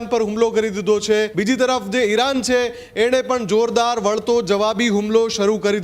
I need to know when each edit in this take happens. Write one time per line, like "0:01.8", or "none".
0:01.3